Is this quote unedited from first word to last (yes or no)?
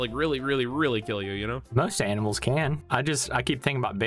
no